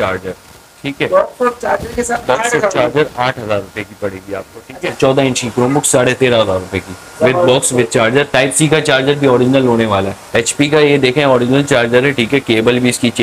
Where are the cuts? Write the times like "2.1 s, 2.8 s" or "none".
5.0 s, 10.4 s

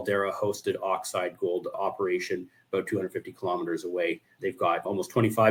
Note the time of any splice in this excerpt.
none

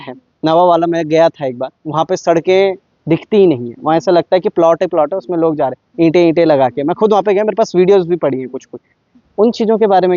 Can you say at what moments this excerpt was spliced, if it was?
none

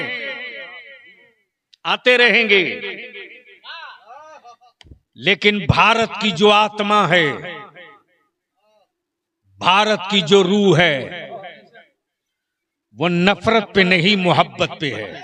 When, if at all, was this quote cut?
none

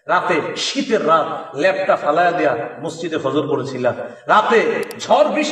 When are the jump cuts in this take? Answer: none

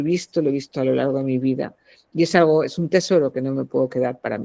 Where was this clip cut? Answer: none

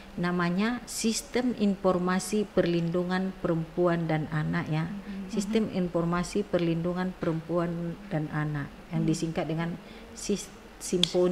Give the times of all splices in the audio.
none

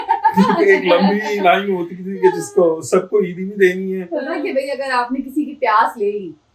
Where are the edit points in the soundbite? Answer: 4.3 s

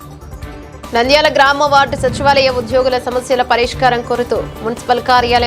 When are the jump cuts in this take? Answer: 0.9 s

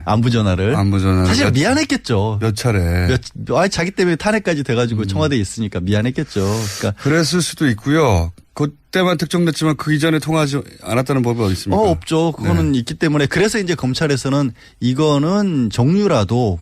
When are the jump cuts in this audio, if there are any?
9.0 s

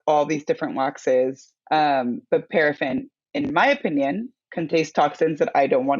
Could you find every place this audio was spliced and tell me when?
1.5 s, 4.4 s

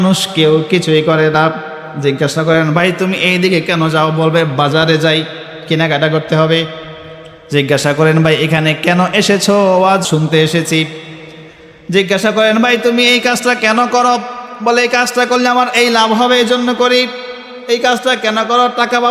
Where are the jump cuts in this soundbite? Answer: 10.0 s

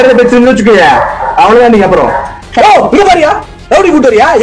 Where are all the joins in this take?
2.4 s

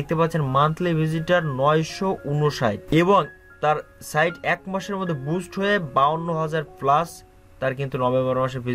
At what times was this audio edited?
none

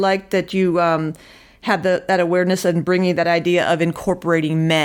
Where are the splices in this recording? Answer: none

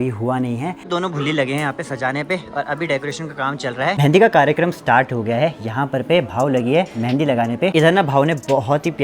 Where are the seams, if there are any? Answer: 0.9 s, 4.0 s, 7.7 s

